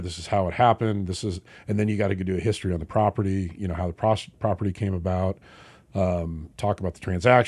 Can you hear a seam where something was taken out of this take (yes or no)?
no